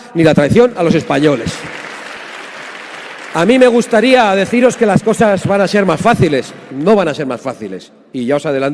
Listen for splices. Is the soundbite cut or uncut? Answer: cut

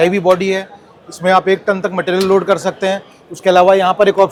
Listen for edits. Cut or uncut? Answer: uncut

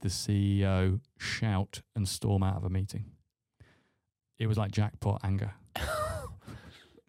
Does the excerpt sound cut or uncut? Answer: cut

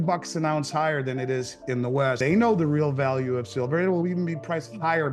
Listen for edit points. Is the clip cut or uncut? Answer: cut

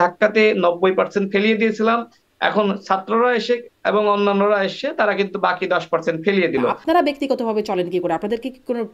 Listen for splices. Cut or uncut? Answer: cut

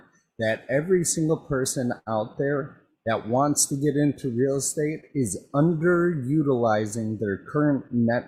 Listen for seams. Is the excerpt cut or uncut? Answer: uncut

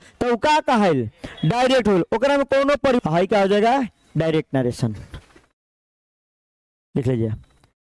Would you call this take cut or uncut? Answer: cut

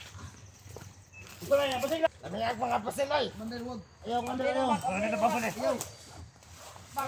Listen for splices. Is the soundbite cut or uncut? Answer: cut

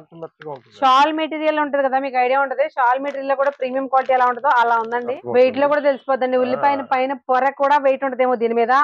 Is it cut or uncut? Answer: cut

